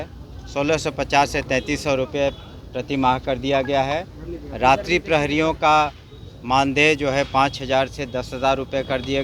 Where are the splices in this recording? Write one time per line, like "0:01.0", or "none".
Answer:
none